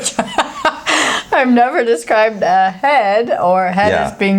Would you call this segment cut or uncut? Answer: uncut